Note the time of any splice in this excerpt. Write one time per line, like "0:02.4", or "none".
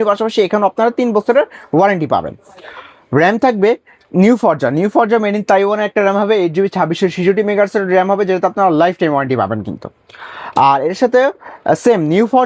none